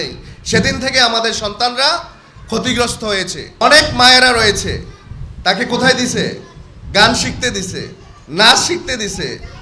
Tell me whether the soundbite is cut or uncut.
cut